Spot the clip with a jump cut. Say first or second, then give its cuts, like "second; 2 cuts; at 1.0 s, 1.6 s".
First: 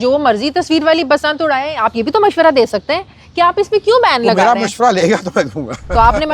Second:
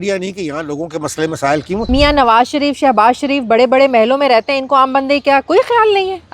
second; 1 cut; at 1.8 s